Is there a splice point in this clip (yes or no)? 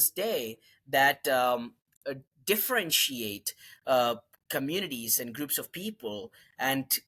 no